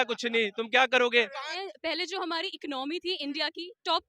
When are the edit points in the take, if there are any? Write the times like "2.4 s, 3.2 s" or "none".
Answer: 1.5 s